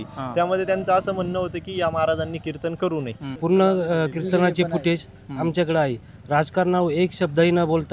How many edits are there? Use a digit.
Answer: 1